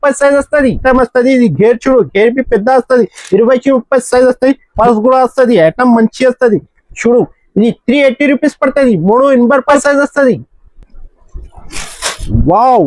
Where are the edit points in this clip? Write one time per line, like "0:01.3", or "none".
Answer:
0:00.8
0:04.7
0:09.7